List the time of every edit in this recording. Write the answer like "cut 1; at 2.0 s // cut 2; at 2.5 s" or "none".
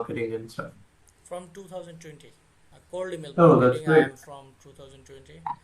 none